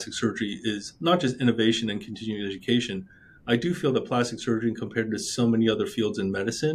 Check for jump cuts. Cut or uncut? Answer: uncut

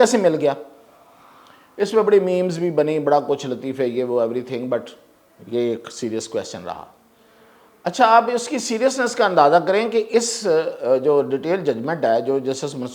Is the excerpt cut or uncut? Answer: uncut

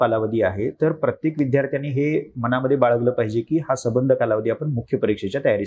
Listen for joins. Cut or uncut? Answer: uncut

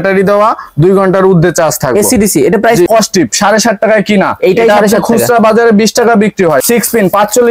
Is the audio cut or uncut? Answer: cut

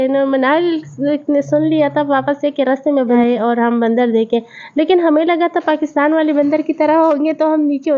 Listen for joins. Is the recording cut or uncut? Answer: cut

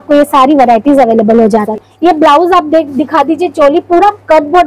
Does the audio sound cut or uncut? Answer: cut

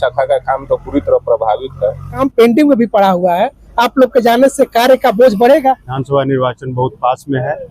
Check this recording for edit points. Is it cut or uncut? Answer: cut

